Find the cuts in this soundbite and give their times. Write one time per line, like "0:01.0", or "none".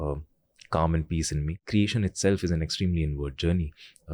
0:01.5

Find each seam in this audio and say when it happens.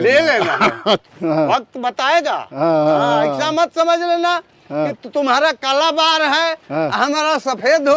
0:01.1

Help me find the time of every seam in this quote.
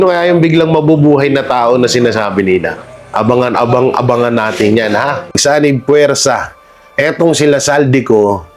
0:05.4

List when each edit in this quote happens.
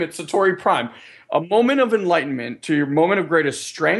0:02.5

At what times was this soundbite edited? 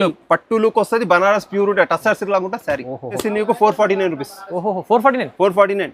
0:03.2

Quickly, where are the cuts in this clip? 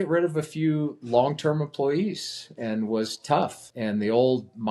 0:03.6

